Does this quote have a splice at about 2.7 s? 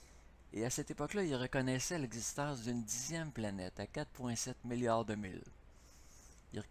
no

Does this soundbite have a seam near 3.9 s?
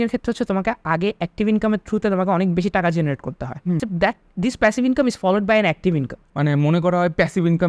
yes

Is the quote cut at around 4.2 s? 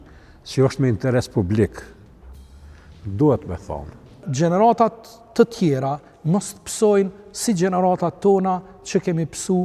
yes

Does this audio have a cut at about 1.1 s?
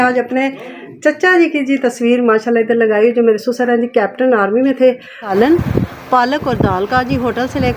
no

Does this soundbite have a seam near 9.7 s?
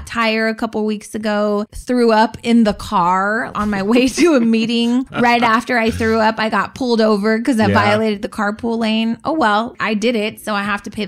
yes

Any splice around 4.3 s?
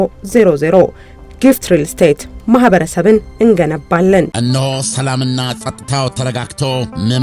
yes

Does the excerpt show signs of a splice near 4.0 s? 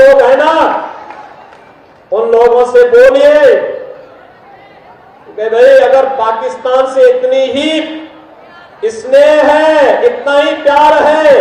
no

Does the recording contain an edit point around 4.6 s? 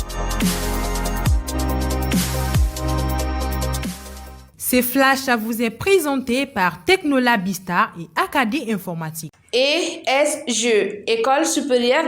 yes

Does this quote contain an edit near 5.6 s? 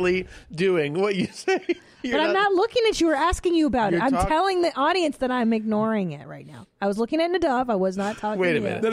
no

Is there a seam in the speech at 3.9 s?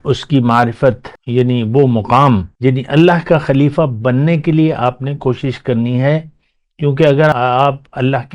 no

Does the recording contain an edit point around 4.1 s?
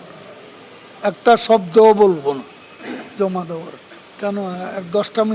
yes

